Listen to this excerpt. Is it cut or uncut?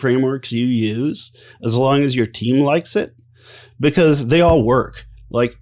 uncut